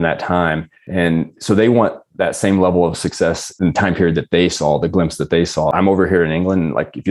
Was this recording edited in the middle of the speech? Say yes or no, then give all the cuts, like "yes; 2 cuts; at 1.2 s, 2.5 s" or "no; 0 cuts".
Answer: yes; 2 cuts; at 3.5 s, 5.7 s